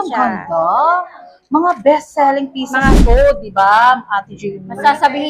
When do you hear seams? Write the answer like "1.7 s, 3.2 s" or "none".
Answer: 3.0 s